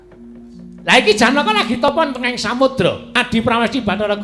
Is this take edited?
yes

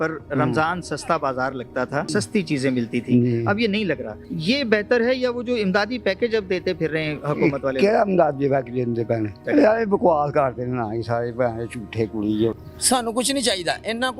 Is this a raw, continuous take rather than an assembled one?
no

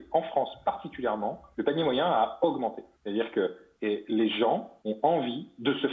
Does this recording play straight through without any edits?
no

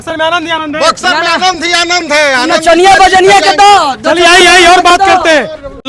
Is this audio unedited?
yes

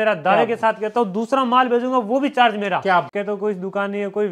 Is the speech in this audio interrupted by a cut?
yes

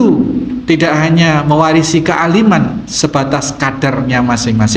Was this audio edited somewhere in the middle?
no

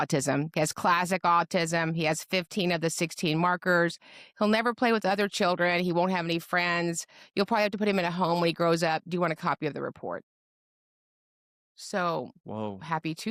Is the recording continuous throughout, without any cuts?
yes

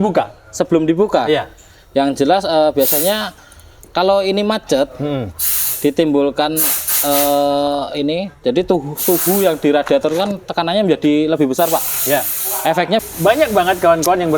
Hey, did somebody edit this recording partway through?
yes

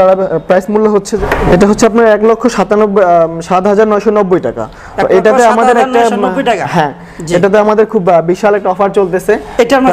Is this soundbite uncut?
no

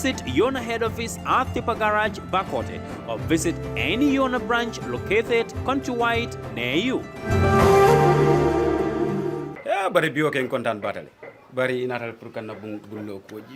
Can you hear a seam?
yes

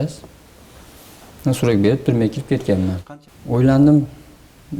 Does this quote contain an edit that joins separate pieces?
yes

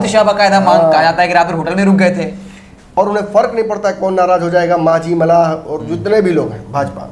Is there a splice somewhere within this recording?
yes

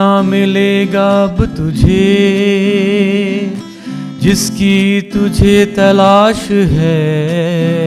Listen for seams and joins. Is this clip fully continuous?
yes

